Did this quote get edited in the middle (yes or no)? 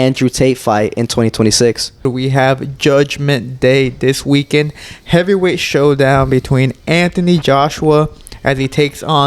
yes